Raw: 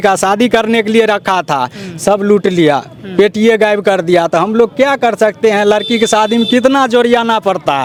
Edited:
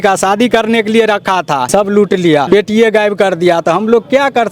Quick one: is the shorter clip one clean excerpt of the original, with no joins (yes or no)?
no